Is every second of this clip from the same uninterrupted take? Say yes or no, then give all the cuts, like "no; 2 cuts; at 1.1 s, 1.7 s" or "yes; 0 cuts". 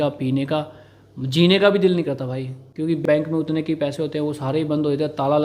no; 1 cut; at 3.0 s